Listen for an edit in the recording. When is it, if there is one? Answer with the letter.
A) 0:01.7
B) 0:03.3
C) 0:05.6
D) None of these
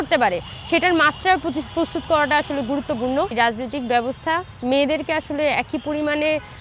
B